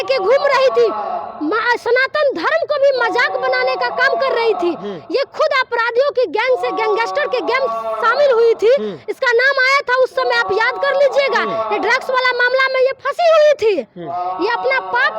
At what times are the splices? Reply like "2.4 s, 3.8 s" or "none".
none